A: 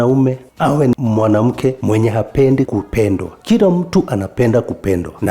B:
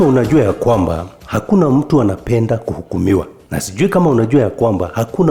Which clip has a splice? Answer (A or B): A